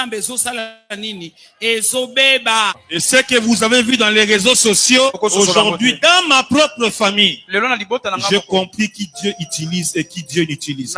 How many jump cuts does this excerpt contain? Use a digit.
2